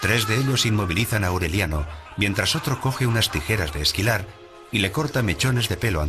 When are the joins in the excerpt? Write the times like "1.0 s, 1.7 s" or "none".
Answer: none